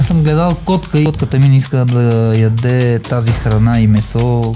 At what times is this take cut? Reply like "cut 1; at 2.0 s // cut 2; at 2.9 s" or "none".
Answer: cut 1; at 1.1 s